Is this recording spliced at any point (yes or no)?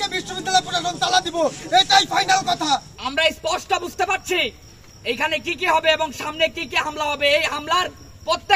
yes